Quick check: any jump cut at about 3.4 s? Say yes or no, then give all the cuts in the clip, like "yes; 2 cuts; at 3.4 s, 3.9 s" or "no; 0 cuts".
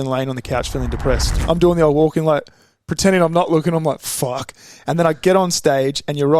no; 1 cut; at 1.3 s